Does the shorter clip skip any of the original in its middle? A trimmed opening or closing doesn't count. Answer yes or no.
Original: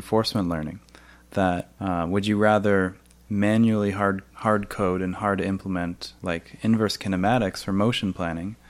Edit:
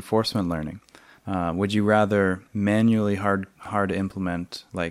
yes